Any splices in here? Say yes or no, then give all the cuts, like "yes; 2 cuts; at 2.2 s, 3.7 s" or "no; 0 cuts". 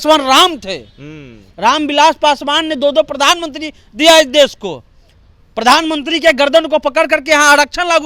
no; 0 cuts